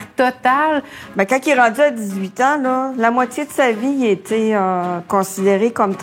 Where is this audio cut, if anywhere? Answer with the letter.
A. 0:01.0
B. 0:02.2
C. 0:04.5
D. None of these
A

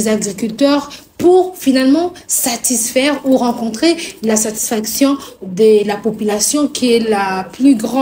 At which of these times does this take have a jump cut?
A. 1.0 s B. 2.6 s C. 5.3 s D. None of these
D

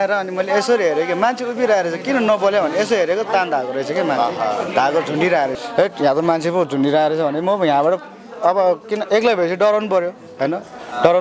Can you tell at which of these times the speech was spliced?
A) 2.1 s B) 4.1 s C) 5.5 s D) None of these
C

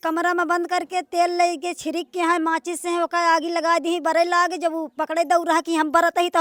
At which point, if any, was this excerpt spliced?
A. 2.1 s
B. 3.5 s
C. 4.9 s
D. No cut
D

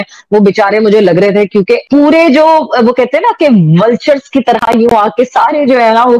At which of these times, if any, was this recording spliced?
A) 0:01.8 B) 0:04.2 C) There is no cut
A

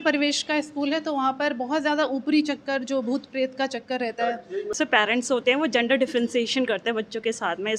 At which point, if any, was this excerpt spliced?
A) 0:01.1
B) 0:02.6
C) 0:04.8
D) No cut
C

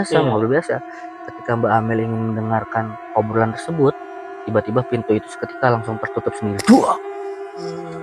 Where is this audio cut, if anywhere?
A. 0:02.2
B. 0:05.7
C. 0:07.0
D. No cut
C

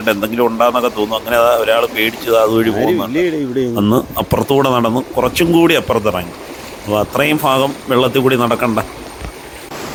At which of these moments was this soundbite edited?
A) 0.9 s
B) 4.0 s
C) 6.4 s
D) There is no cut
D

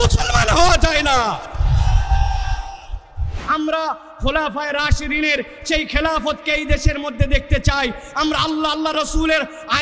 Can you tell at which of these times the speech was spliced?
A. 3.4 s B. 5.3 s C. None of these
A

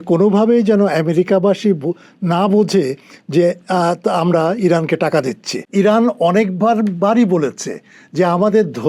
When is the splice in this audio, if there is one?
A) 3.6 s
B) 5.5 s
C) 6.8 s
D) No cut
B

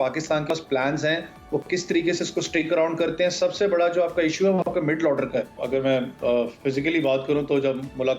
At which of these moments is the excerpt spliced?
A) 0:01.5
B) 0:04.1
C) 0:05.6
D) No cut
C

